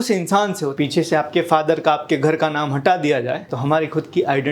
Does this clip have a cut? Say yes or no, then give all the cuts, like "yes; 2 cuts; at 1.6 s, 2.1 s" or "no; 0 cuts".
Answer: yes; 2 cuts; at 0.7 s, 3.5 s